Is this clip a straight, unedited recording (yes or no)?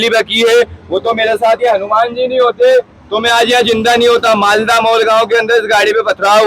yes